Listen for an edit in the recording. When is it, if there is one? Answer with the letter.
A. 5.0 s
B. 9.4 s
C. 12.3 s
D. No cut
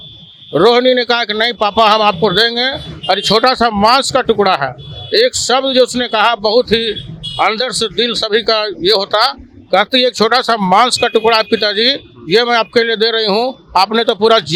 D